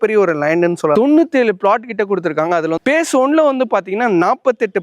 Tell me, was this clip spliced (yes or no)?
yes